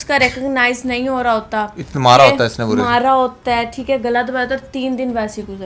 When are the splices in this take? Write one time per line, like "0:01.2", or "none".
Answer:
none